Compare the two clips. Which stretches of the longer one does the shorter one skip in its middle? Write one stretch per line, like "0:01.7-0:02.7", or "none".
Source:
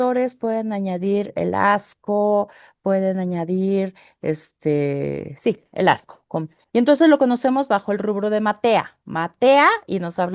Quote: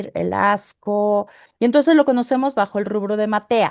0:02.6-0:06.6

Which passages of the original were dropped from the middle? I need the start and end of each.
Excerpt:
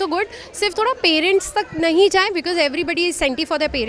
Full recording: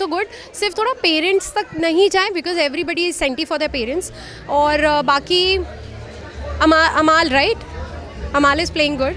none

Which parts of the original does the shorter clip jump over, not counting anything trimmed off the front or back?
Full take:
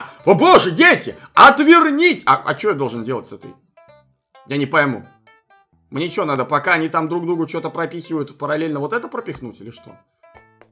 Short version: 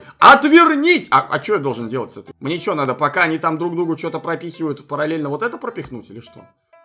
0:03.4-0:05.7

